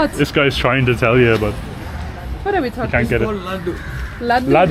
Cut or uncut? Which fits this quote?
uncut